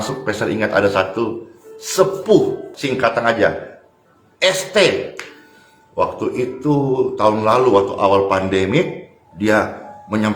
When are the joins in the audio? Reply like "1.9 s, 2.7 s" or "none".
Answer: 2.7 s